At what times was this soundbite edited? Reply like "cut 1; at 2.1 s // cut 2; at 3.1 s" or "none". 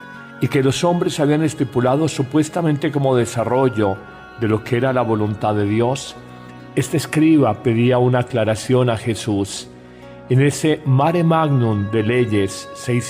cut 1; at 1.3 s